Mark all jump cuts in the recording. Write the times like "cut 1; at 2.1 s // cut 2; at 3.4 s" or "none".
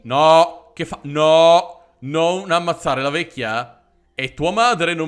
none